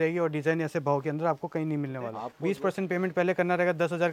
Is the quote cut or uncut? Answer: cut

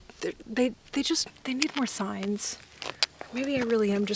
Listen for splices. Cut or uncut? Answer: uncut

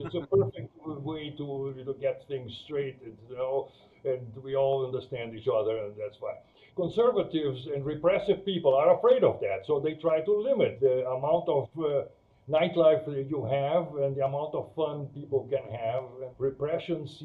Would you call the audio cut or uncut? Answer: cut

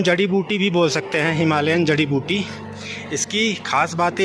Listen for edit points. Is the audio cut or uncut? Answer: uncut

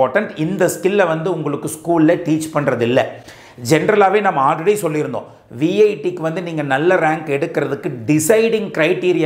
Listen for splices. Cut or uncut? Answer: uncut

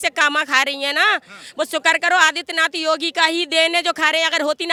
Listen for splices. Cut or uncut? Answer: uncut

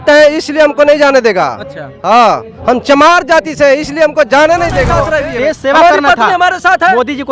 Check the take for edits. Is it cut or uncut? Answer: cut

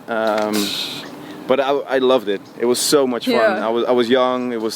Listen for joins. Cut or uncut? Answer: uncut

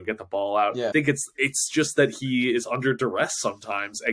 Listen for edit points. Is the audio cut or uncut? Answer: cut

